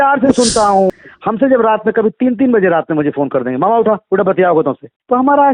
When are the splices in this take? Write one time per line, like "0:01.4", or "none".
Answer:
0:00.9